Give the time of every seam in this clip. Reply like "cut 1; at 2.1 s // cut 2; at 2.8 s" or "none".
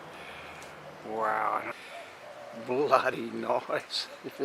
cut 1; at 1.7 s